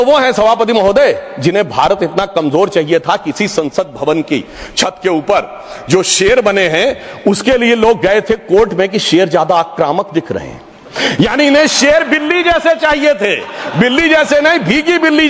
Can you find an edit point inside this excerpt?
no; 0 cuts

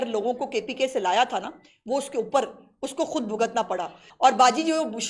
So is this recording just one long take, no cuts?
no; 1 cut; at 4.0 s

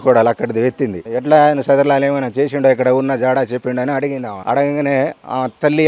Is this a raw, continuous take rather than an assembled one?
no; 2 cuts; at 1.0 s, 4.3 s

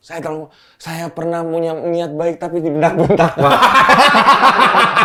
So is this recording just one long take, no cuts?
yes; 0 cuts

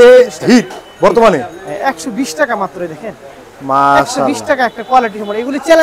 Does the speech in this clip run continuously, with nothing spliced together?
yes; 0 cuts

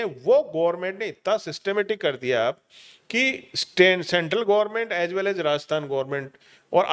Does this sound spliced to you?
no; 0 cuts

